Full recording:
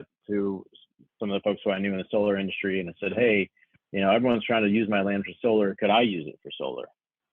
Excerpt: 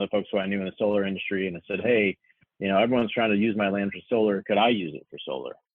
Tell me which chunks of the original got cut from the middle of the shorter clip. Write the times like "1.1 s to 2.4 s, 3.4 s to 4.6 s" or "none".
none